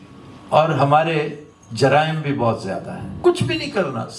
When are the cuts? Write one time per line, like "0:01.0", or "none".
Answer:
0:03.1